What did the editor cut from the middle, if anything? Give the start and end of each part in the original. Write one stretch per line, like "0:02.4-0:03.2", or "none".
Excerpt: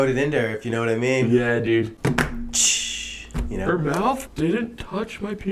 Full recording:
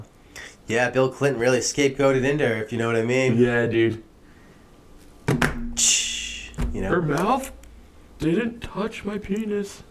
0:04.0-0:05.2
0:07.5-0:08.1